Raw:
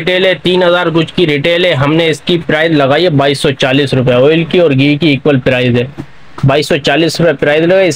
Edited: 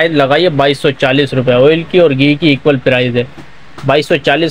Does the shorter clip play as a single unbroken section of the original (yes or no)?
yes